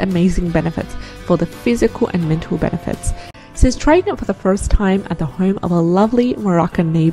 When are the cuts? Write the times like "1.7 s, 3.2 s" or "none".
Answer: 3.3 s